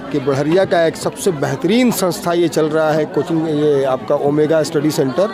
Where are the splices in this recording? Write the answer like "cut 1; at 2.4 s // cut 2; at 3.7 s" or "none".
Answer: none